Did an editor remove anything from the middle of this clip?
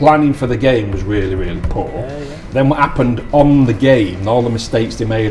no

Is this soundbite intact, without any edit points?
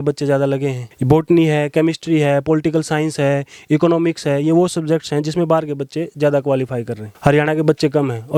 yes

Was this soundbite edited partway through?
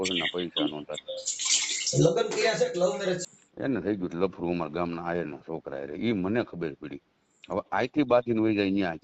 yes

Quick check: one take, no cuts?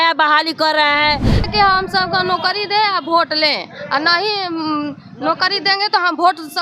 no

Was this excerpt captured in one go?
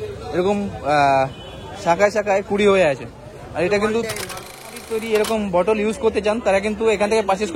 no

